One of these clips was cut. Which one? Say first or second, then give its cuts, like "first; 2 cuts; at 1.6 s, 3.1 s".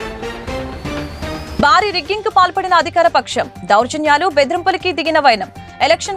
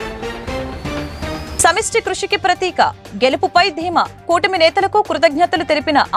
second; 1 cut; at 1.5 s